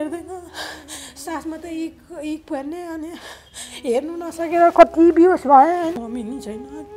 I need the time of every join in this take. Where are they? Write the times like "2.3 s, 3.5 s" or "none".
6.0 s